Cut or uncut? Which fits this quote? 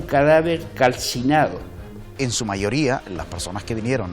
cut